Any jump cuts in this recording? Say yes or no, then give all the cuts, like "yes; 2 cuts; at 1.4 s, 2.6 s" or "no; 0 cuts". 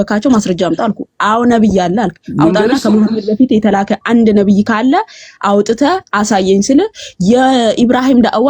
no; 0 cuts